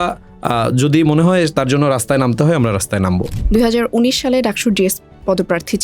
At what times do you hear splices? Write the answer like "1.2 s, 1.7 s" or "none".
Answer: 3.3 s